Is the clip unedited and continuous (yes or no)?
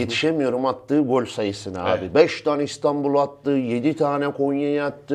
yes